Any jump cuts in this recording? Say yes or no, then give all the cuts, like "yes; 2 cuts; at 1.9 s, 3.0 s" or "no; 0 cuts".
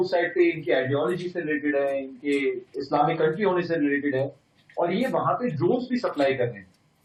no; 0 cuts